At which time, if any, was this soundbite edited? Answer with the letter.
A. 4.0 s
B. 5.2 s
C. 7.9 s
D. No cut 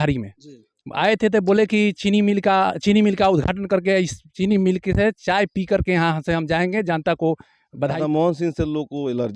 C